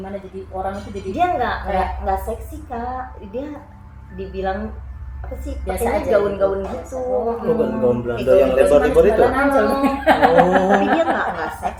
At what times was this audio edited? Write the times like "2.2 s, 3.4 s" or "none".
none